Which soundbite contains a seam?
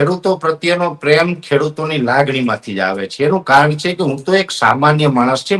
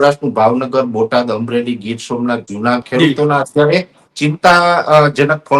second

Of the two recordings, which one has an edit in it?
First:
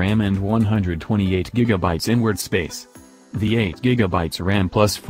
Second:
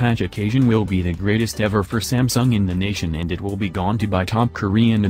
first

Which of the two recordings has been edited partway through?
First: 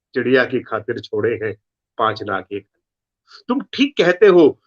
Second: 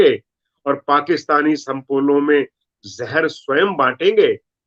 first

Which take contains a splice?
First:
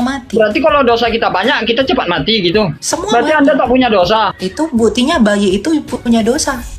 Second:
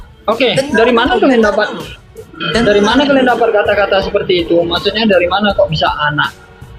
first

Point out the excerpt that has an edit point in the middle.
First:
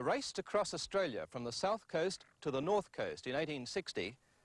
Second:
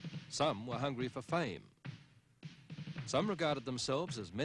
second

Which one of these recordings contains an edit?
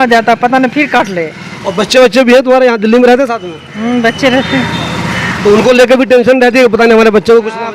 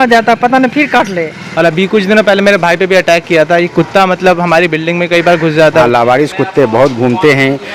second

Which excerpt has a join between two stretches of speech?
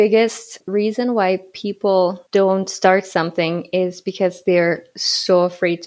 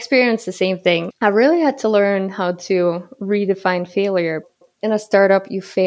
second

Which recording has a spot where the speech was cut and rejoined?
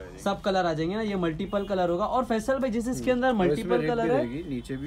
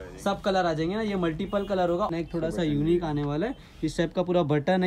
second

